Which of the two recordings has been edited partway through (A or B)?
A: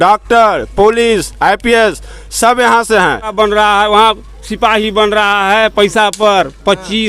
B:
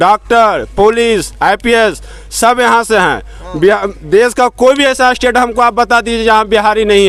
A